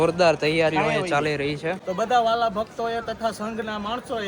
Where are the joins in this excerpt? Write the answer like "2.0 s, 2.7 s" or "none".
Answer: 1.8 s

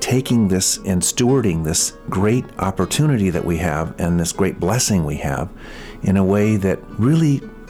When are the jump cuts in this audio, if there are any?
0.8 s, 1.9 s, 2.5 s, 6.9 s

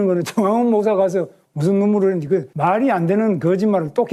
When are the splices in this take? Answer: none

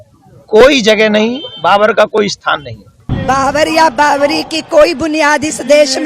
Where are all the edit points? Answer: 3.0 s

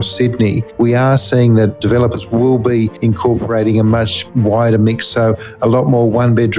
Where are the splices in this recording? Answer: 1.8 s, 2.9 s, 4.2 s

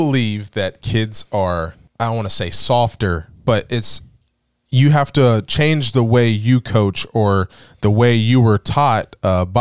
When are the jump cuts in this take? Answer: 1.8 s

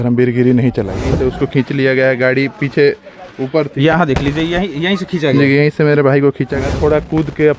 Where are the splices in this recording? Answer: 1.0 s, 6.5 s

